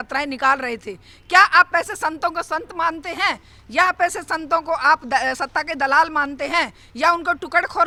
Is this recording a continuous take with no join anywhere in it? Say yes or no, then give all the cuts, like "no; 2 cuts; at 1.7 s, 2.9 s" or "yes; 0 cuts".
yes; 0 cuts